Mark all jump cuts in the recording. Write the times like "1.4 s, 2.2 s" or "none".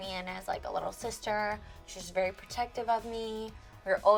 none

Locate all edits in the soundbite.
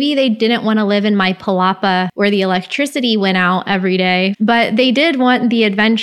2.1 s, 4.3 s

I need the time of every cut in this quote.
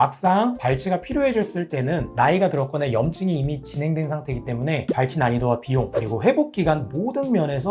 none

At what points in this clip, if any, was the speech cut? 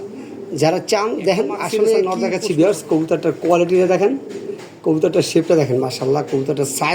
2.0 s

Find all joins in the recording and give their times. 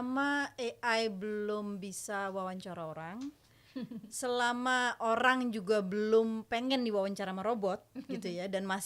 none

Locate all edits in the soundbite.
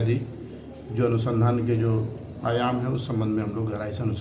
none

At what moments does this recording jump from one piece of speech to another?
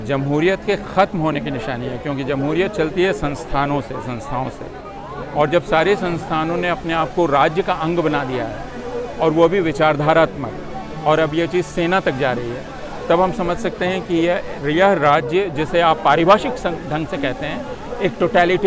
none

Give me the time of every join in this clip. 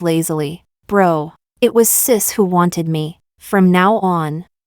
1.4 s

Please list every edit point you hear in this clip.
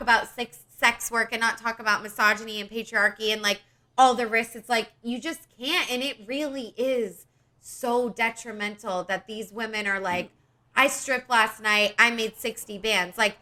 none

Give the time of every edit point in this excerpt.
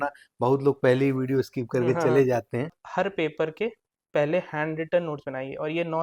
2.7 s

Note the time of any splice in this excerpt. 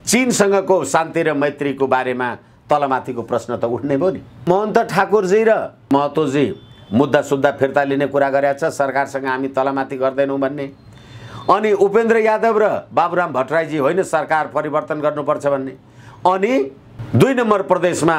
4.4 s, 5.9 s

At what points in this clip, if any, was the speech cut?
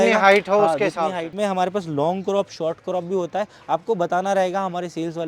1.3 s

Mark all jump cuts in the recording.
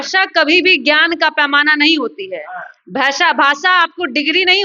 none

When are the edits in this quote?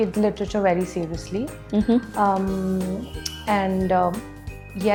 none

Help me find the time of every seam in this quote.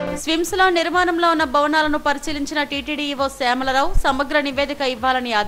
none

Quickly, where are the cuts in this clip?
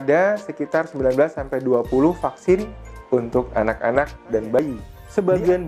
4.6 s

